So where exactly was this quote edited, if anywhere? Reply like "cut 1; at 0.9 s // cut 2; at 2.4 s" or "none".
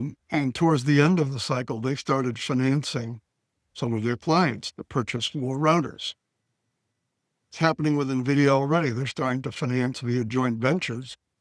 none